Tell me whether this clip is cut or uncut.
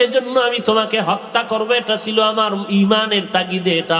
uncut